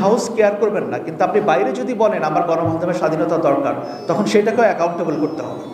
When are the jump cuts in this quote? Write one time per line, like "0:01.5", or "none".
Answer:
none